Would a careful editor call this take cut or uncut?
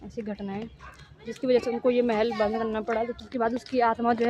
cut